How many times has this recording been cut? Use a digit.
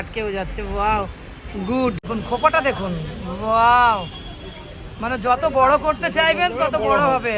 1